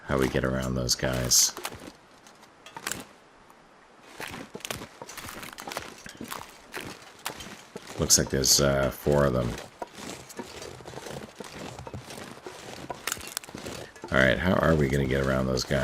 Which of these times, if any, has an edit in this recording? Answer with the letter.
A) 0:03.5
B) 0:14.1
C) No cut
B